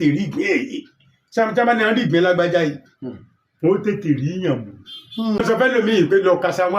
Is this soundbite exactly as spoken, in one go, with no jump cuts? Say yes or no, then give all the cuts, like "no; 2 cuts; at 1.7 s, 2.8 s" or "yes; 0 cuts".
no; 1 cut; at 5.4 s